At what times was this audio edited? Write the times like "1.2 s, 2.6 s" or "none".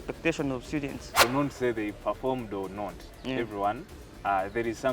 1.2 s